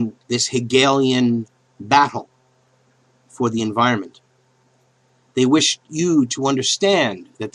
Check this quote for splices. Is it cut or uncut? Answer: uncut